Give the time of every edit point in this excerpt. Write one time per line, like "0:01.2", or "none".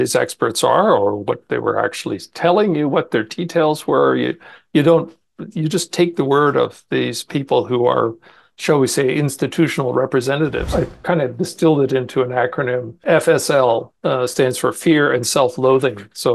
0:10.7
0:13.0